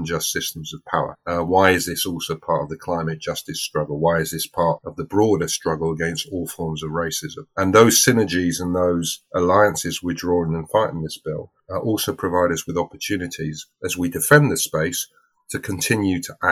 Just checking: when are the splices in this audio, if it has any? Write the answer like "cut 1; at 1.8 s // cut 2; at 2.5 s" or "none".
none